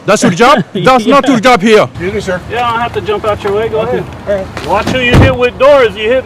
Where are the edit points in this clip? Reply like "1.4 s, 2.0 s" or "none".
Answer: 2.0 s